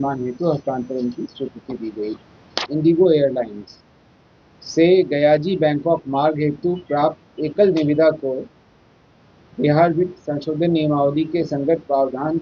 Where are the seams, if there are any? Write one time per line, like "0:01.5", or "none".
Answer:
0:02.5